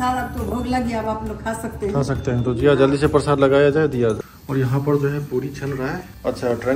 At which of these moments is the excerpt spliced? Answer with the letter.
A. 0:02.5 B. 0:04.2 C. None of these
B